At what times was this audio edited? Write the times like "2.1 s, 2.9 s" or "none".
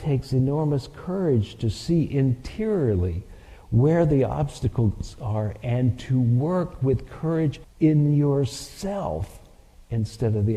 7.6 s